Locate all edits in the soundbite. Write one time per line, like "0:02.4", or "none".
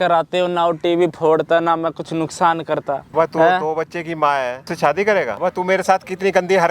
0:03.1
0:04.6
0:05.3

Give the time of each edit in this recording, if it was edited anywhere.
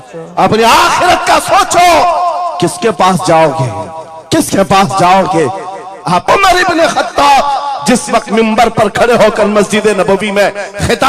0:06.2

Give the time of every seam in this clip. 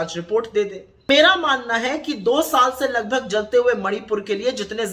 0:01.1

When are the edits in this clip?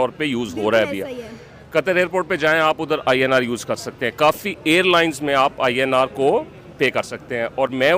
none

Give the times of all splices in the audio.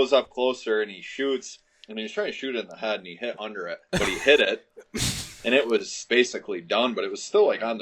0:03.8
0:06.0

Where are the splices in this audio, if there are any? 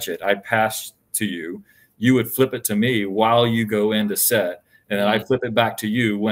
none

